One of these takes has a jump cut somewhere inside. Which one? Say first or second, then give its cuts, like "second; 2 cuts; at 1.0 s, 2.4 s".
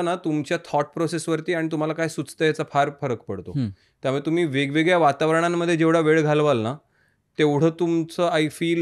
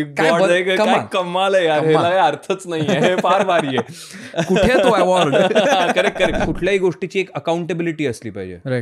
second; 1 cut; at 6.5 s